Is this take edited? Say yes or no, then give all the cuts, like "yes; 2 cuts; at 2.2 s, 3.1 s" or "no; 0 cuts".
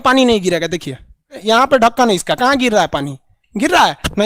yes; 1 cut; at 1.3 s